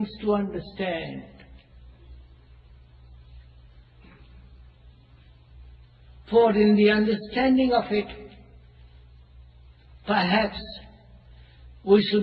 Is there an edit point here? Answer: yes; 1 cut; at 8.2 s

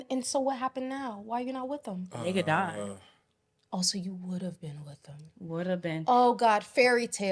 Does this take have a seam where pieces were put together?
no; 0 cuts

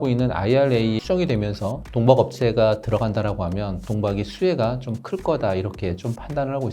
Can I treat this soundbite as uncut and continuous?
no; 2 cuts; at 1.0 s, 3.8 s

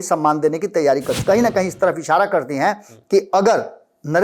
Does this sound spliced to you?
yes; 1 cut; at 1.1 s

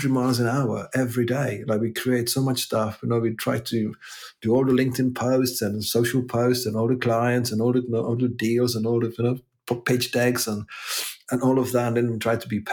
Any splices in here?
no; 0 cuts

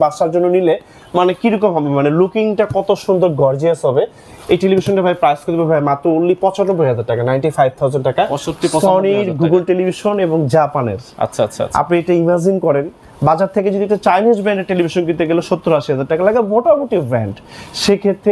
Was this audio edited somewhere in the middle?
no; 0 cuts

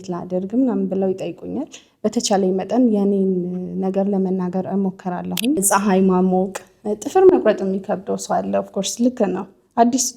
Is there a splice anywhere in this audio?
yes; 1 cut; at 5.6 s

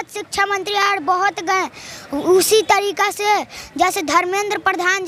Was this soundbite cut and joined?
no; 0 cuts

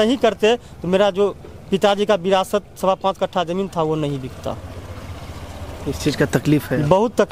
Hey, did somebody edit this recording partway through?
no; 0 cuts

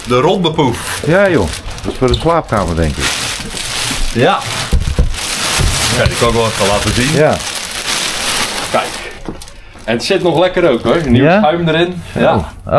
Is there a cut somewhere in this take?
no; 0 cuts

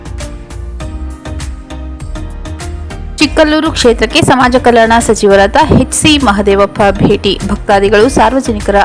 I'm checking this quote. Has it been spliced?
yes; 1 cut; at 3.1 s

